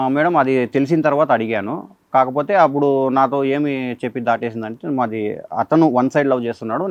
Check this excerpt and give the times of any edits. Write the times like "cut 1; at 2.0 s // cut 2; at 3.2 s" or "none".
none

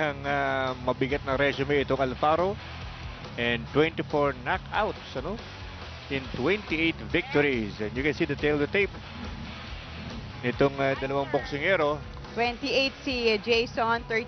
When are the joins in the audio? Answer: cut 1; at 6.8 s

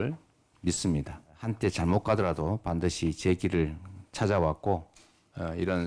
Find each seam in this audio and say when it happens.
cut 1; at 1.4 s

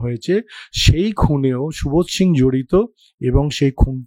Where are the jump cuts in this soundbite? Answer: none

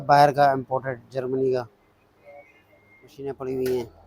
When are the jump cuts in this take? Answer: cut 1; at 3.2 s

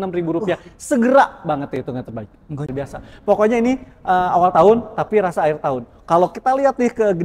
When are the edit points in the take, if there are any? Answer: cut 1; at 2.7 s

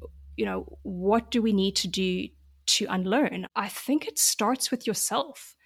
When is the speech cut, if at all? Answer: cut 1; at 3.4 s

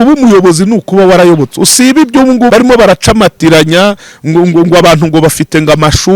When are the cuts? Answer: cut 1; at 2.5 s

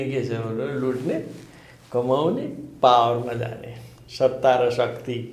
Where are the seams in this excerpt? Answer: none

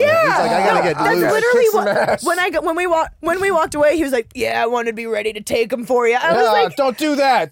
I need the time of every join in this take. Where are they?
none

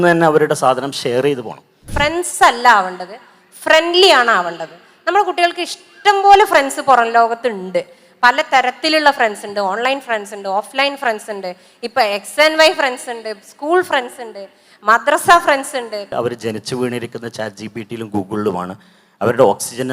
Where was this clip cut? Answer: cut 1; at 1.8 s // cut 2; at 16.1 s

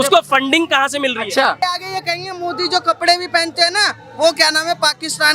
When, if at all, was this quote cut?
cut 1; at 1.6 s

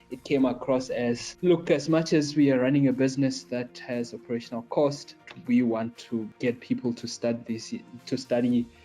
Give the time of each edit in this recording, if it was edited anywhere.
cut 1; at 1.3 s // cut 2; at 5.3 s // cut 3; at 6.3 s

